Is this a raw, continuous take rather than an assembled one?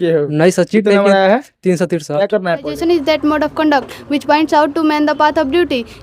no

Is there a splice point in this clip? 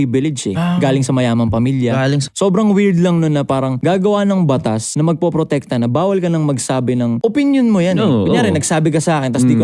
yes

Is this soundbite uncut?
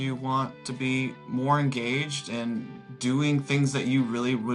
yes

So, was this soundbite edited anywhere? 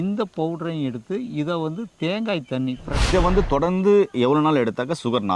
yes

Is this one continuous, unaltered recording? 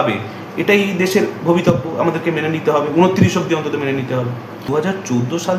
no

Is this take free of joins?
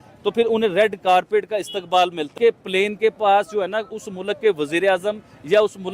no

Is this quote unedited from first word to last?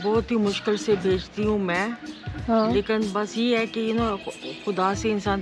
yes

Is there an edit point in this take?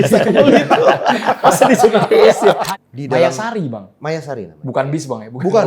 yes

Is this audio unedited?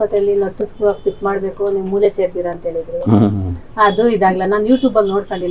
yes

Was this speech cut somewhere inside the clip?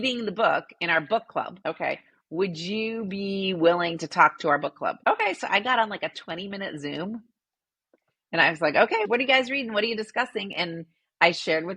yes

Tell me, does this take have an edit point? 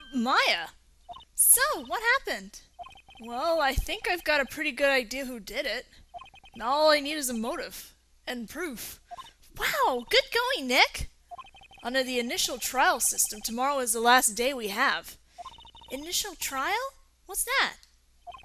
yes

